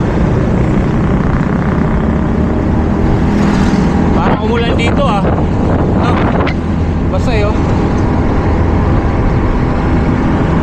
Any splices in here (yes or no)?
no